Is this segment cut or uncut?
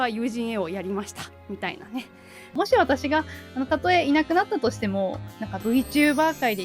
cut